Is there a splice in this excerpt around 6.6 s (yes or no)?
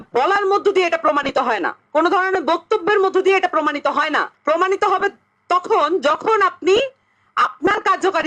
no